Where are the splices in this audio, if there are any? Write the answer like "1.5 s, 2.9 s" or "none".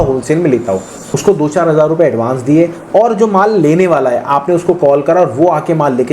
1.0 s